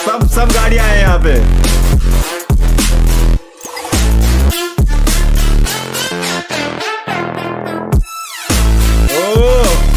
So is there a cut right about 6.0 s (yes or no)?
no